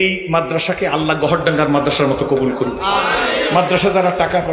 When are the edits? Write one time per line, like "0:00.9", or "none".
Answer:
none